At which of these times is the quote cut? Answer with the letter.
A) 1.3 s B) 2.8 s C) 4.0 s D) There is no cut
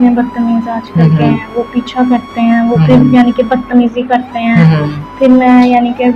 D